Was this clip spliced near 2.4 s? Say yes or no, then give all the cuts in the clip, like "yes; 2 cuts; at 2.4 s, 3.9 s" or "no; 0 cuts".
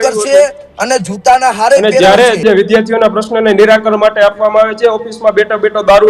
yes; 1 cut; at 2.4 s